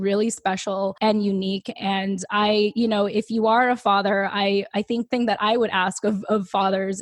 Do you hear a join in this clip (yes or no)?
yes